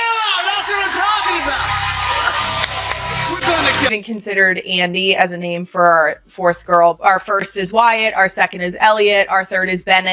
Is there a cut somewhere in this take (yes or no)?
yes